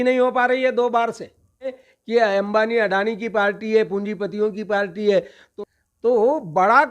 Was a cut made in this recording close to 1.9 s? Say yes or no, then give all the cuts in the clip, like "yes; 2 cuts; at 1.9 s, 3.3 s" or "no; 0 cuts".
yes; 2 cuts; at 1.9 s, 5.4 s